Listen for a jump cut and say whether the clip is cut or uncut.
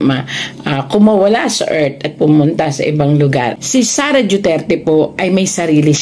cut